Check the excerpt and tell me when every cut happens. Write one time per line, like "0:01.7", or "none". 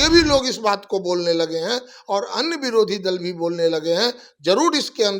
none